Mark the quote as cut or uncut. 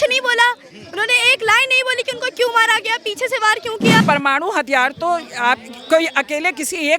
cut